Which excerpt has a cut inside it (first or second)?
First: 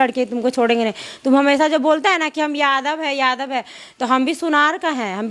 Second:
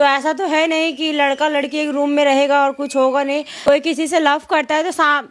second